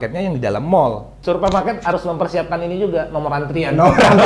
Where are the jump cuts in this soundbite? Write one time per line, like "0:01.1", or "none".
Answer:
0:01.2